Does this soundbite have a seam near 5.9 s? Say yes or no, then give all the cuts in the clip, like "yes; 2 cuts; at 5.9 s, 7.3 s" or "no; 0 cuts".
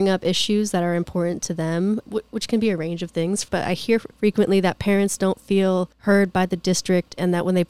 yes; 3 cuts; at 2.0 s, 3.7 s, 5.9 s